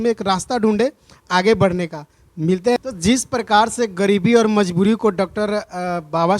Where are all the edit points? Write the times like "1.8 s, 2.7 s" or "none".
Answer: 2.8 s